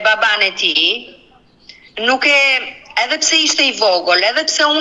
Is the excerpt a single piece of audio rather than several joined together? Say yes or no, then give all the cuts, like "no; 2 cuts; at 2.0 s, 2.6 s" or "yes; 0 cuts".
yes; 0 cuts